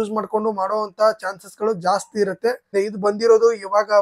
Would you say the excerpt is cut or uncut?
cut